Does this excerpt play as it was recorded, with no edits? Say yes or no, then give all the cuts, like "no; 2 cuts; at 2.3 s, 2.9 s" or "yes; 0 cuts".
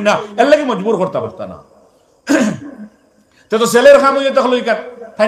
yes; 0 cuts